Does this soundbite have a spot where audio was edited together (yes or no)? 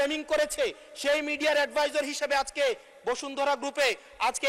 no